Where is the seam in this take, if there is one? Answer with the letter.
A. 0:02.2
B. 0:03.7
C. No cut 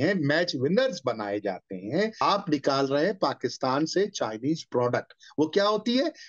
A